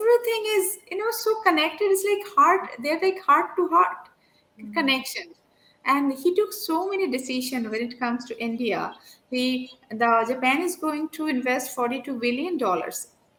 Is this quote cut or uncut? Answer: uncut